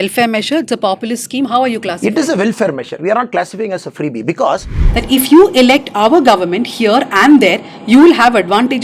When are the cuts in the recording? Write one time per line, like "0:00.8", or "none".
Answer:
0:04.9

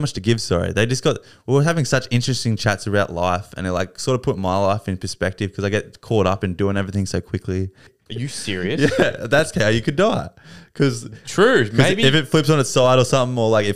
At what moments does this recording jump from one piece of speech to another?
0:08.0

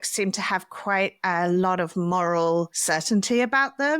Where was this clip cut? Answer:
0:02.8

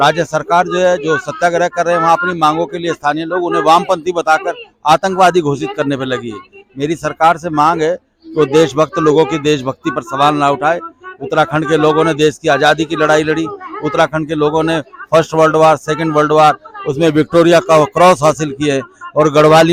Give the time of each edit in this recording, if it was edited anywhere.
none

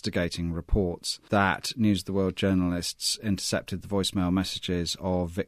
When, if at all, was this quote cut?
0:01.1

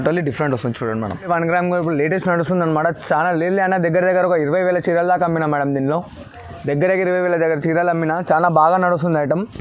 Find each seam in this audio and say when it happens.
0:01.3

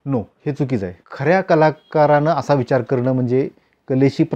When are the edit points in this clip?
0:01.0

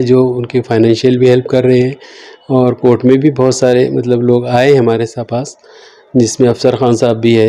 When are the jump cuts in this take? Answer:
none

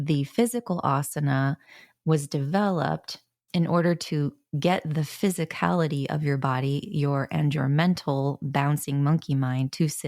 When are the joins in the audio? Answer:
none

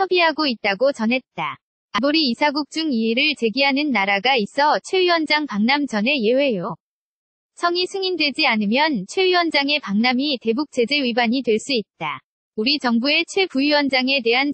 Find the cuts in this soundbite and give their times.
0:02.0

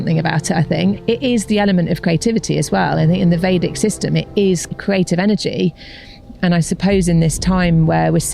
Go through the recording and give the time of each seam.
0:01.0
0:04.7

